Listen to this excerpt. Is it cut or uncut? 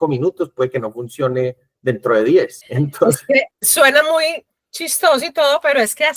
uncut